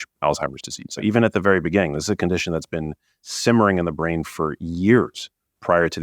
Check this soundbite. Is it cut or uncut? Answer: cut